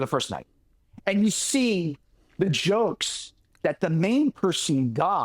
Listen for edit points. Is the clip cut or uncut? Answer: uncut